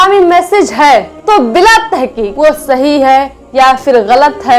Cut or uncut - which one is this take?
cut